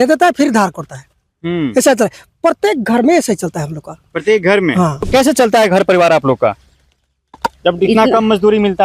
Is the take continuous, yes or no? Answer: no